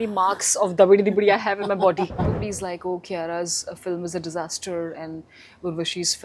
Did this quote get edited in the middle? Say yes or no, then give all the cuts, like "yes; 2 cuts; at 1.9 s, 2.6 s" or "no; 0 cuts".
yes; 1 cut; at 2.3 s